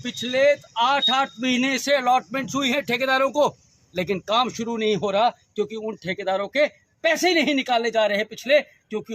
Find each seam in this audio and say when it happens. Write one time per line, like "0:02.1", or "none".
none